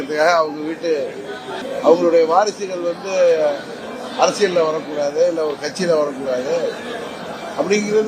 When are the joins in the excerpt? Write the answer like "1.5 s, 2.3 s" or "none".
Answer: 1.5 s